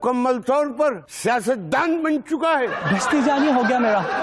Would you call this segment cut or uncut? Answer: uncut